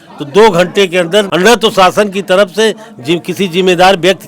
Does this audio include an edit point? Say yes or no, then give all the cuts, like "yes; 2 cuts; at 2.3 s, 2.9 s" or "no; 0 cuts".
yes; 1 cut; at 1.3 s